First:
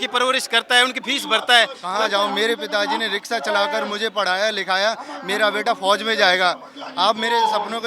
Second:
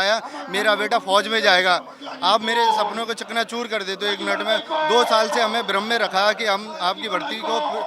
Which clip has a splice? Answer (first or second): first